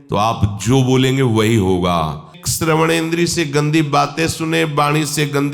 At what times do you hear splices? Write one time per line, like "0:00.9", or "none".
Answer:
0:02.4